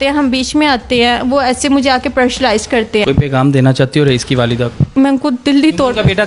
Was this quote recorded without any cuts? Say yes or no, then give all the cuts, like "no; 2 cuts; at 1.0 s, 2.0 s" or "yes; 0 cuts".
no; 2 cuts; at 3.0 s, 4.9 s